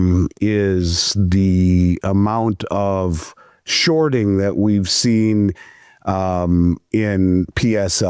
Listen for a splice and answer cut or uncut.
uncut